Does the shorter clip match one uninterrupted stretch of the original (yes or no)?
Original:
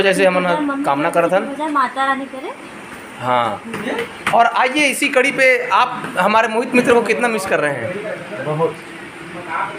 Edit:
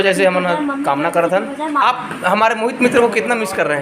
no